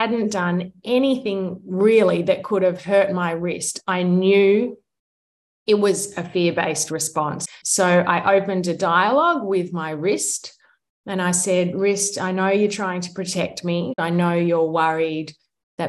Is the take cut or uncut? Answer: cut